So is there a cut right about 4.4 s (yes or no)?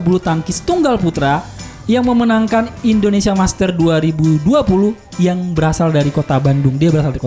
no